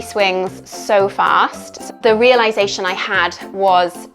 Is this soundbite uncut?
no; 1 cut; at 1.9 s

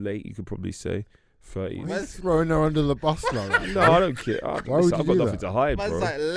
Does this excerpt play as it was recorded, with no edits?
yes; 0 cuts

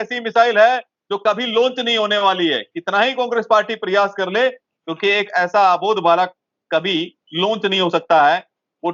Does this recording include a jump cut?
no; 0 cuts

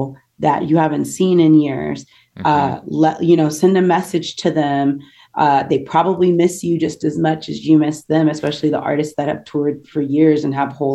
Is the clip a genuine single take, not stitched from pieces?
yes; 0 cuts

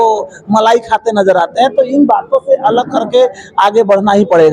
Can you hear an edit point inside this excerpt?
no; 0 cuts

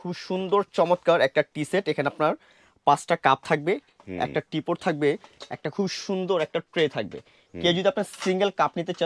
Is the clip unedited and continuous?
yes; 0 cuts

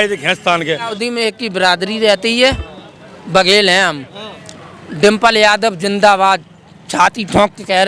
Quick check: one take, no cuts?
no; 1 cut; at 1.0 s

